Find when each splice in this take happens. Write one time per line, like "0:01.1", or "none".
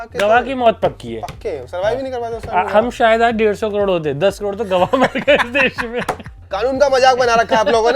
0:06.4